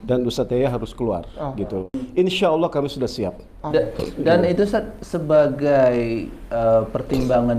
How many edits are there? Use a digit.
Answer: 1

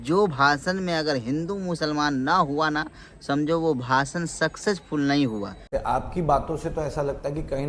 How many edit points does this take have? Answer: 1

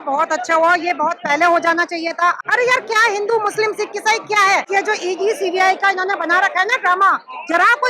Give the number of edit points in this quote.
2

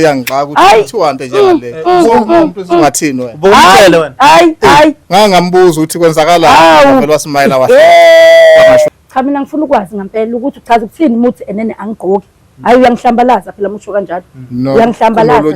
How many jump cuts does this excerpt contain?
1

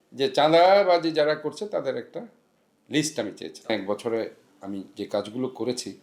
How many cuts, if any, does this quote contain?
1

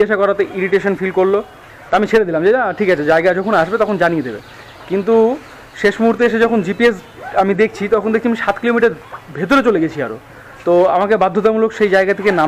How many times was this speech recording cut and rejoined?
0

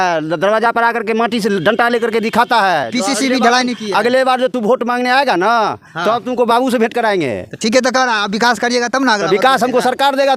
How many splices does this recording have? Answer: 0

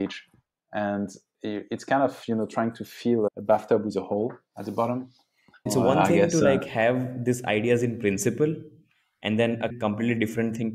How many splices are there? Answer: 3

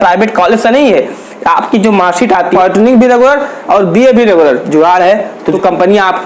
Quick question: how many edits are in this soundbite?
2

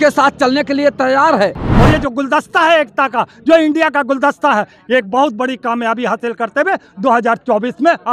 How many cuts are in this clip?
1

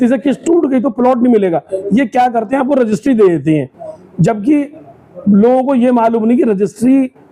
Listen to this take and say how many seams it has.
0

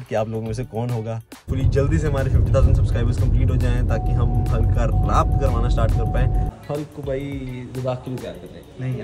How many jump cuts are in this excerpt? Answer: 2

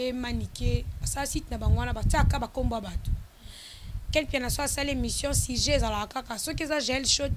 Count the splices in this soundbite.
0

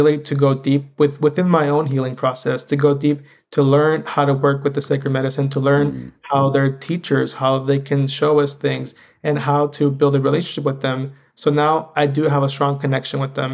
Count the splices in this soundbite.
0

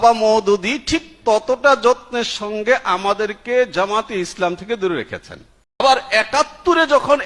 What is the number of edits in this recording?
1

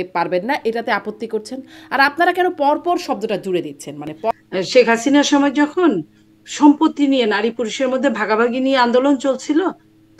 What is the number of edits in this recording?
1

